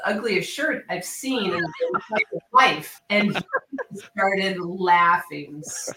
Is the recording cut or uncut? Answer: uncut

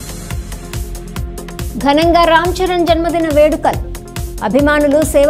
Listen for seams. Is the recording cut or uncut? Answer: cut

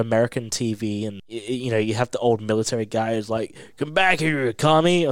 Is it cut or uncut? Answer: cut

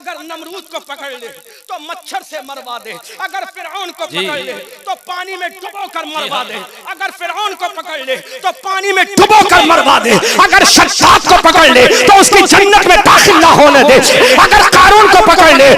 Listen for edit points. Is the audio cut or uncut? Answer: cut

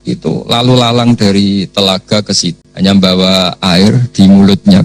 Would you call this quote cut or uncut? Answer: cut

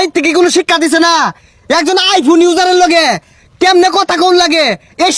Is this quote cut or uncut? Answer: uncut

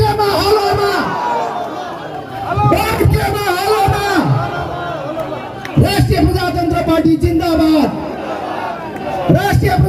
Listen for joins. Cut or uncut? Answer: uncut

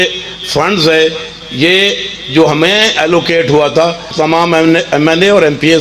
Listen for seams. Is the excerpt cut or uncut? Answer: cut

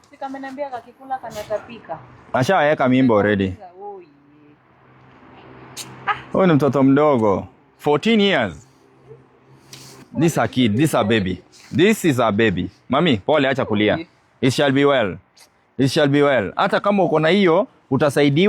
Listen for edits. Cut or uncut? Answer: cut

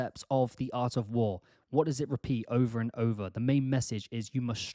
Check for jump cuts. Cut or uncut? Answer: uncut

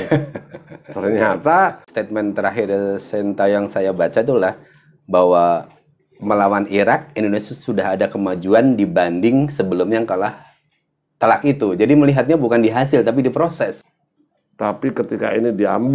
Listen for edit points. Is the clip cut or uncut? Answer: cut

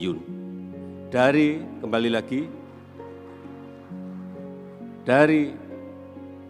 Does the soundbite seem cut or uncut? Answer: cut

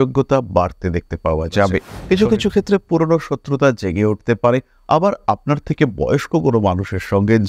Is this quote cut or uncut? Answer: cut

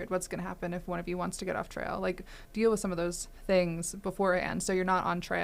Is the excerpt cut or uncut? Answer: cut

